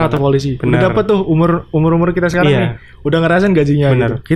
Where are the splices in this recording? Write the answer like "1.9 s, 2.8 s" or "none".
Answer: none